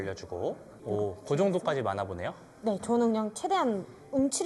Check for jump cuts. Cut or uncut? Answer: uncut